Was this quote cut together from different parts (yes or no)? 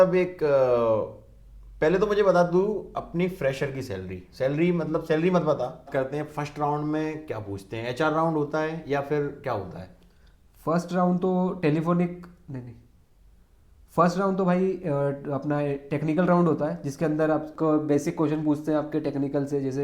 yes